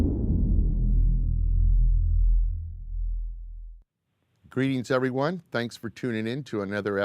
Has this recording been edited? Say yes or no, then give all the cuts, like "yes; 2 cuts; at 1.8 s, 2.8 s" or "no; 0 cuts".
yes; 1 cut; at 2.3 s